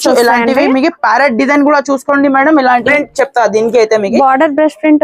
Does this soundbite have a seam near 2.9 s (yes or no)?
yes